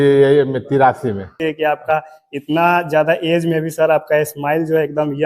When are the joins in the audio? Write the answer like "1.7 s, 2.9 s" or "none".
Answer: 1.4 s